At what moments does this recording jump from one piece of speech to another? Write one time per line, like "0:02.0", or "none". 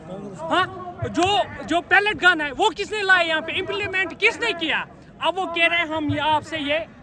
none